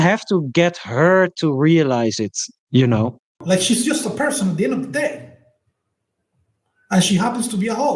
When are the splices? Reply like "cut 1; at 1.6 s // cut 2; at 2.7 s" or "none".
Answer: cut 1; at 3.1 s